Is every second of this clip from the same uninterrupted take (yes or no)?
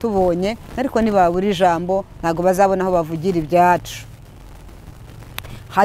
yes